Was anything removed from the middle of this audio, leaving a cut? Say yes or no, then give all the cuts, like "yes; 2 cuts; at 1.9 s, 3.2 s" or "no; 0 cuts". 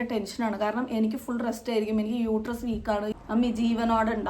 yes; 1 cut; at 3.1 s